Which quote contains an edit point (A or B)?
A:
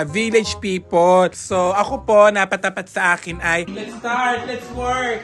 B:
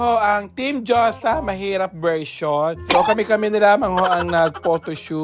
A